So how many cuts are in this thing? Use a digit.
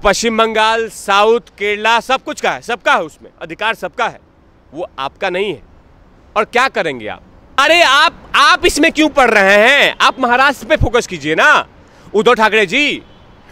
1